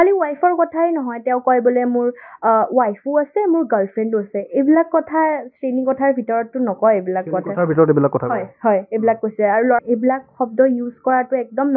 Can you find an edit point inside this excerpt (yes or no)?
yes